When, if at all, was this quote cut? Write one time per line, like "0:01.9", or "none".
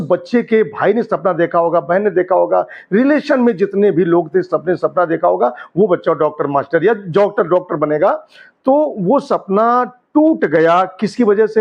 none